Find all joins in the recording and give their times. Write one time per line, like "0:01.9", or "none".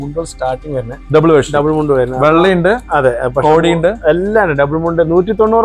none